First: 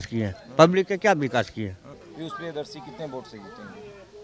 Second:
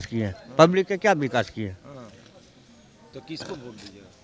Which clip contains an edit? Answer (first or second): first